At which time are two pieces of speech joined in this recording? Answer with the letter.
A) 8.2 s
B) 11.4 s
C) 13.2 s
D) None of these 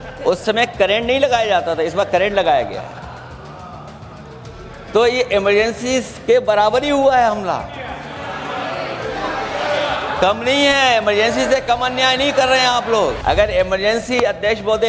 C